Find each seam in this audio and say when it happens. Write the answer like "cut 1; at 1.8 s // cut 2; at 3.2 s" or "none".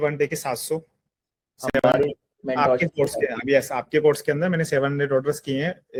none